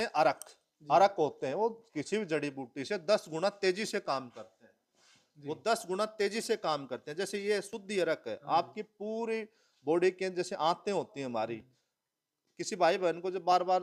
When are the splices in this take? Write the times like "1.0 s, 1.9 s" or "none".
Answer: none